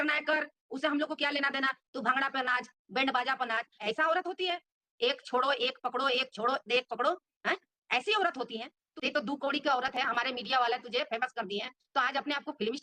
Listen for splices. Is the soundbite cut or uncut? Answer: cut